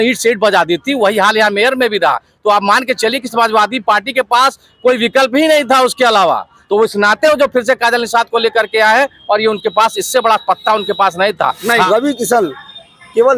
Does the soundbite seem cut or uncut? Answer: cut